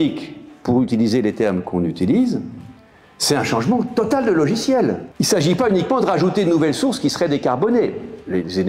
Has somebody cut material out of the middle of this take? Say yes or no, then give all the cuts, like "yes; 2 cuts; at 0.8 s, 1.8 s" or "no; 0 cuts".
yes; 1 cut; at 5.1 s